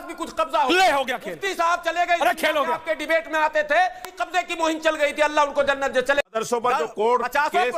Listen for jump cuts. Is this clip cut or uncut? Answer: cut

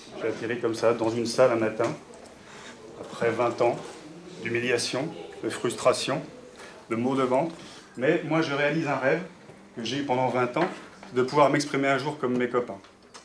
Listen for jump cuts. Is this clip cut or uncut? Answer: uncut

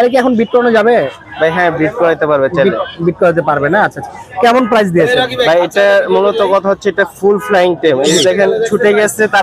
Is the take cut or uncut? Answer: uncut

